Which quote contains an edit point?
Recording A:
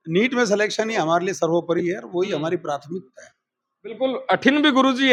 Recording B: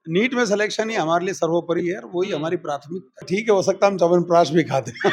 B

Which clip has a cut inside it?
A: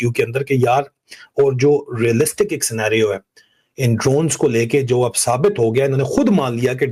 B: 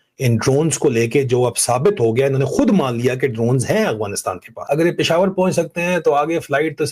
B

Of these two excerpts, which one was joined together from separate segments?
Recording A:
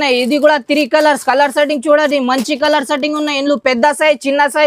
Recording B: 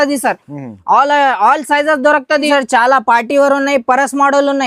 B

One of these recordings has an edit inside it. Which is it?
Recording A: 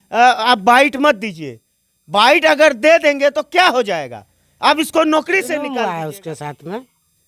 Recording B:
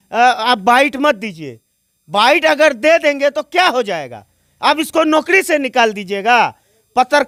A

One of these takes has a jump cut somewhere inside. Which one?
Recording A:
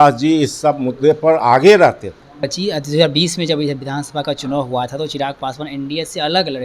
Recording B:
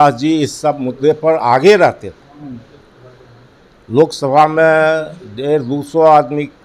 A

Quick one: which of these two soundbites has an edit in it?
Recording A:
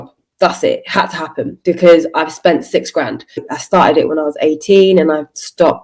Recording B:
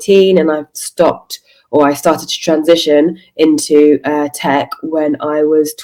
A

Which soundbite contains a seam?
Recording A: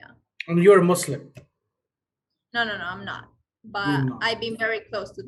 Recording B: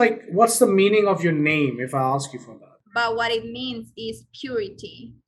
B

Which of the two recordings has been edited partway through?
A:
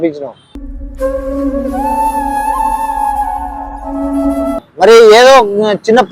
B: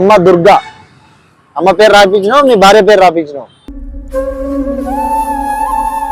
A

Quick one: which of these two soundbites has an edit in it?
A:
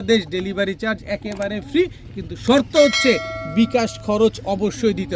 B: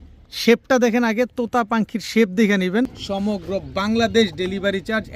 B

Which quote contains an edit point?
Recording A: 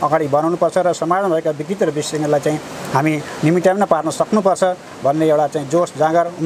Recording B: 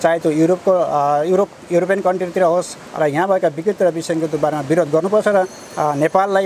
B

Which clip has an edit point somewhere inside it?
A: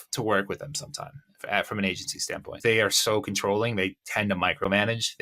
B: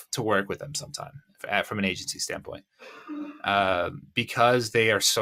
A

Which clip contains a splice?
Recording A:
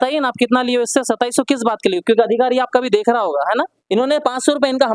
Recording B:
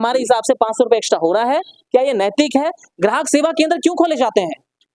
A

